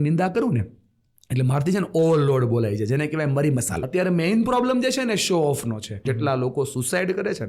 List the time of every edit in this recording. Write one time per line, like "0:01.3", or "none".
0:03.8
0:06.0